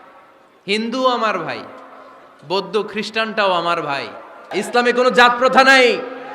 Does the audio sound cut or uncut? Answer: cut